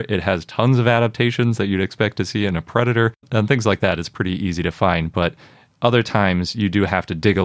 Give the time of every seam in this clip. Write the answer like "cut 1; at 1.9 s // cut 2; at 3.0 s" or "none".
cut 1; at 3.3 s